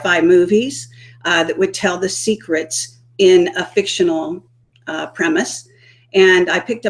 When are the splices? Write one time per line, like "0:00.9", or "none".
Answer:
0:01.6